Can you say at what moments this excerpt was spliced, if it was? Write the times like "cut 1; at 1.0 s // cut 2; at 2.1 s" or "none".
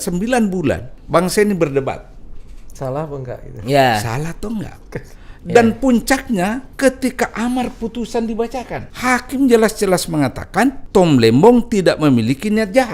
cut 1; at 0.9 s // cut 2; at 6.7 s // cut 3; at 8.8 s // cut 4; at 10.8 s